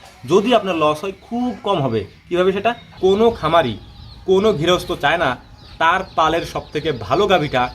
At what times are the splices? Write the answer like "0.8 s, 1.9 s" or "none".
2.9 s